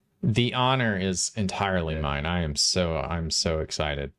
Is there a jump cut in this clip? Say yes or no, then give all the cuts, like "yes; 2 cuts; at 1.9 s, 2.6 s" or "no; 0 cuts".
no; 0 cuts